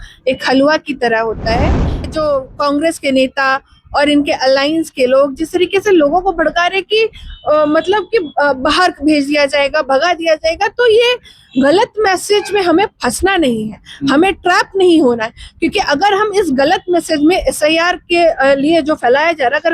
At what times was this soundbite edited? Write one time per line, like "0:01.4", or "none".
0:02.0